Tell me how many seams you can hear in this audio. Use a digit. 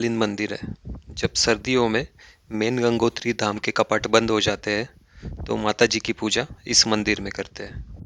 0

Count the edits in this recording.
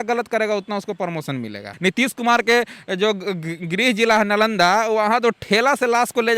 1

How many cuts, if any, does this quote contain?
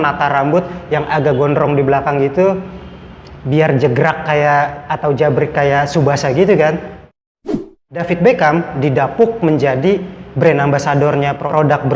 1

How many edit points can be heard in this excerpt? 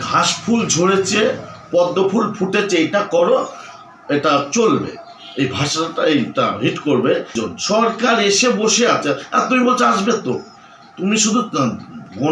1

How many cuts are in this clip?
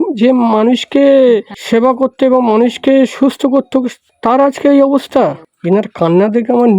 2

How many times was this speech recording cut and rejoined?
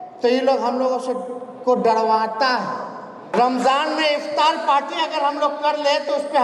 1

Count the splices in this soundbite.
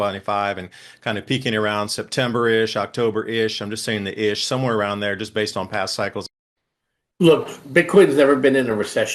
1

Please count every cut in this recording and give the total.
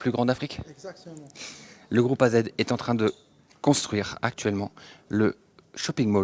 0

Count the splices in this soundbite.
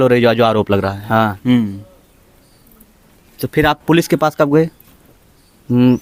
0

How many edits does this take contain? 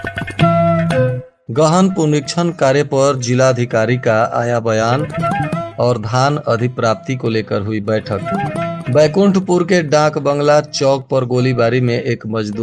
1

